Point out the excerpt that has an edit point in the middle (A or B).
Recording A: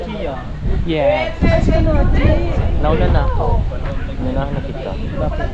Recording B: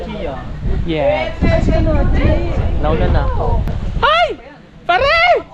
B